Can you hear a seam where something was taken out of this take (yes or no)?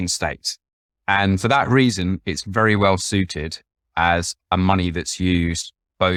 no